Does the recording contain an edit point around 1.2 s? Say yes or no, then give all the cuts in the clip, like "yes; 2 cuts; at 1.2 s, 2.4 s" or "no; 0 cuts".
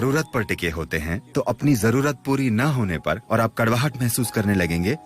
yes; 2 cuts; at 1.2 s, 3.2 s